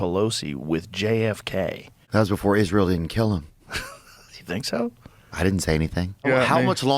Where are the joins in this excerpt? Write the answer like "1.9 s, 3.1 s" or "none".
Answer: 2.0 s, 6.2 s